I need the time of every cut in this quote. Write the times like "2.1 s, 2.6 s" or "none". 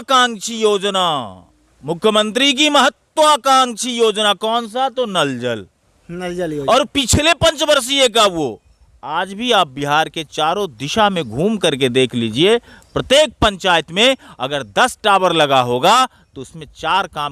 none

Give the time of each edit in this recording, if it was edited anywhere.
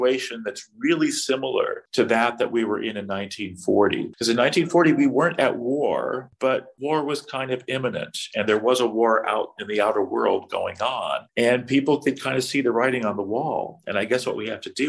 1.8 s, 4.1 s, 6.5 s, 11.2 s

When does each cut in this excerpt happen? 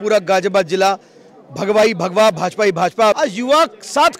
3.2 s

